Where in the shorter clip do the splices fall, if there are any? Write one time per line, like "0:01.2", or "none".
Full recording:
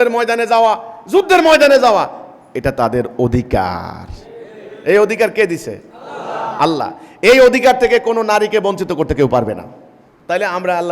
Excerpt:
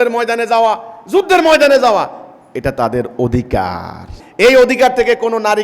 0:04.2